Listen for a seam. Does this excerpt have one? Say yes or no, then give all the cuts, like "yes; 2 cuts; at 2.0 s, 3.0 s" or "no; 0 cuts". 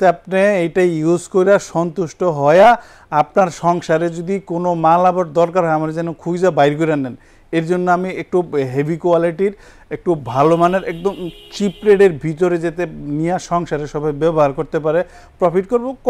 no; 0 cuts